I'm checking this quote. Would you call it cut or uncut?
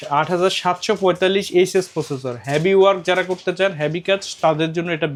uncut